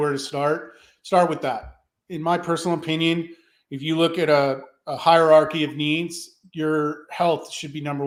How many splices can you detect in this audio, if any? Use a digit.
0